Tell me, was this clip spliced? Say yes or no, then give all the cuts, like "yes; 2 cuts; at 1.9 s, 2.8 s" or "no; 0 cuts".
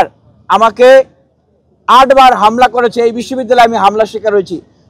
no; 0 cuts